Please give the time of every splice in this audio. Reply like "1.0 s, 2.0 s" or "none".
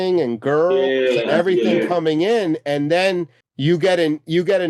3.4 s